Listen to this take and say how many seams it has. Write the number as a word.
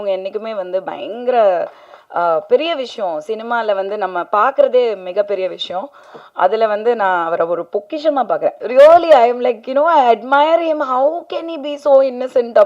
one